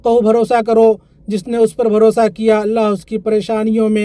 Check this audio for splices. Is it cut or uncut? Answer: uncut